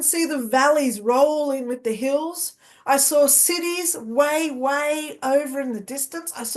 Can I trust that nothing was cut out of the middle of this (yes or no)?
yes